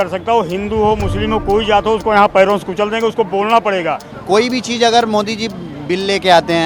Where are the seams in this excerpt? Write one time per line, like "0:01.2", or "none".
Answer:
0:04.1